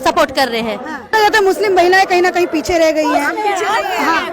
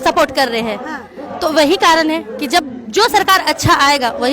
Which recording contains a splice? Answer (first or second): first